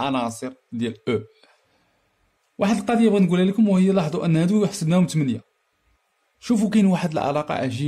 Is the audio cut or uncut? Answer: uncut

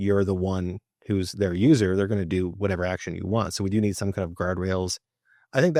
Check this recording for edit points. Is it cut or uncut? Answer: uncut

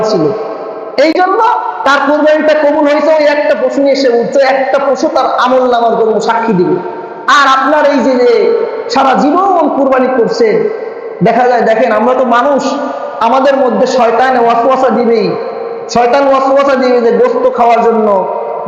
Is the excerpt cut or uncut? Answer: uncut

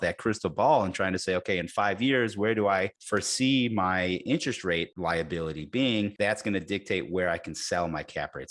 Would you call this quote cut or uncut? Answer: cut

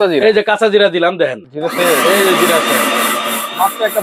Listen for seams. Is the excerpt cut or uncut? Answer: cut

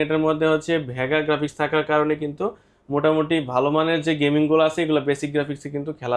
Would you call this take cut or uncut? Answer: uncut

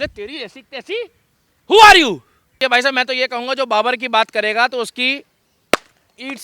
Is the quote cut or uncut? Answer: cut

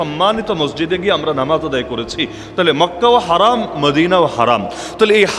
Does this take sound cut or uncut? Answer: uncut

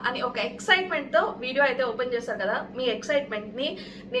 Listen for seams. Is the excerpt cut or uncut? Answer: uncut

